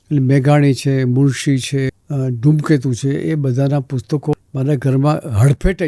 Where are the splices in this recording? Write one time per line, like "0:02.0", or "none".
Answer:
0:02.0
0:04.4